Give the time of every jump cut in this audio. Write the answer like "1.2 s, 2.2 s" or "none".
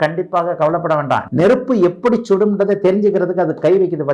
1.2 s